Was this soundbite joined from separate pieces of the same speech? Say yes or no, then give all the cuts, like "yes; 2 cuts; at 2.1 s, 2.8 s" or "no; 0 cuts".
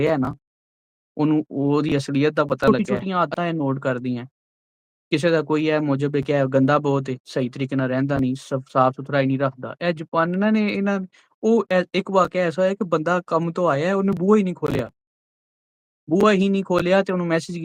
yes; 1 cut; at 2.7 s